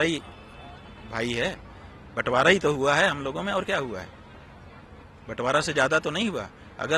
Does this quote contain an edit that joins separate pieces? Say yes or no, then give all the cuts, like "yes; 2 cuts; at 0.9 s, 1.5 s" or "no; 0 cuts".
no; 0 cuts